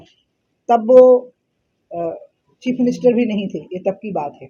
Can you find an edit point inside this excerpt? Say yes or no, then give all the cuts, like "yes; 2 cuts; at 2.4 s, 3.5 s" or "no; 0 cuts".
no; 0 cuts